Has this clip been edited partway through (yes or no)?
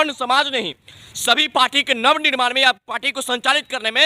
no